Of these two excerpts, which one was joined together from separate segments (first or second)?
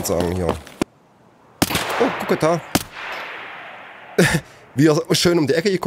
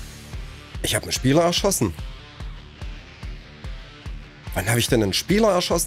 first